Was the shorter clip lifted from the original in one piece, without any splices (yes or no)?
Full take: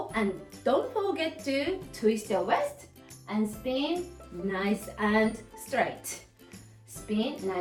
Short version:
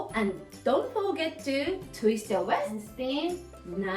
no